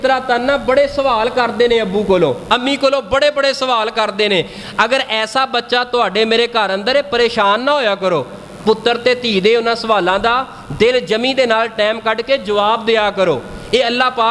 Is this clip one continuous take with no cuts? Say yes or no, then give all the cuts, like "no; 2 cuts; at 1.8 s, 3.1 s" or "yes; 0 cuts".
yes; 0 cuts